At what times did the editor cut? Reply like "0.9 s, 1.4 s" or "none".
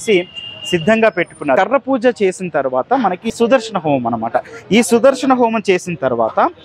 1.6 s, 3.3 s